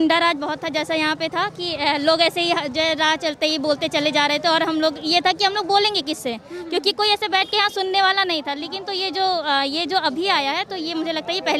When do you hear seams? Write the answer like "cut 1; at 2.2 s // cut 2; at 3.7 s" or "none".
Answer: none